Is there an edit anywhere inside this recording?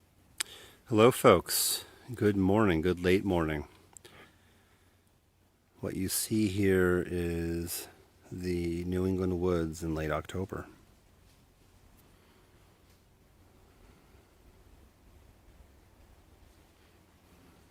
no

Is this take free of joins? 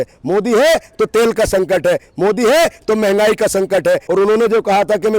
no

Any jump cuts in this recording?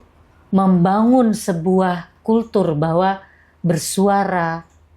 yes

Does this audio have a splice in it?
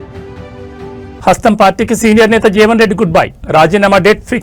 yes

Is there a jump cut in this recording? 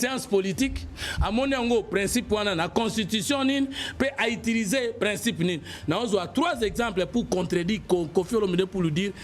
no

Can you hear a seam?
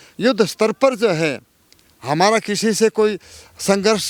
no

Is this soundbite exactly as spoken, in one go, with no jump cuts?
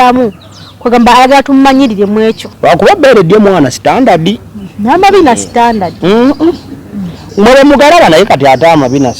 no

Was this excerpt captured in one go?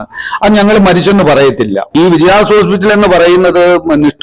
no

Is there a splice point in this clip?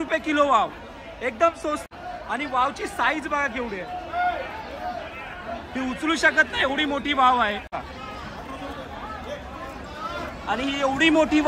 yes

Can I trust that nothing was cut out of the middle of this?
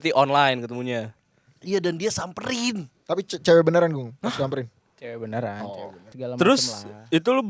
no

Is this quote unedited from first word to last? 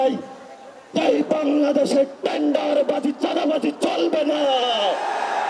yes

